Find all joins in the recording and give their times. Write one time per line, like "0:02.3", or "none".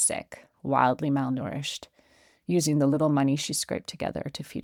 none